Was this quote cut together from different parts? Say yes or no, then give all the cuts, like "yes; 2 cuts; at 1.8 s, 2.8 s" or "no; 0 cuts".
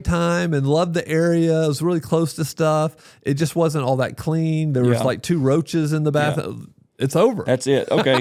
no; 0 cuts